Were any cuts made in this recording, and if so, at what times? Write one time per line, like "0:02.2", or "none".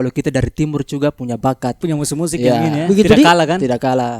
0:01.8